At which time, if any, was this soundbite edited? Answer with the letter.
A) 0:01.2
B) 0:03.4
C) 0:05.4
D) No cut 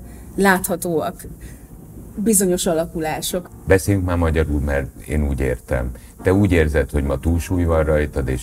B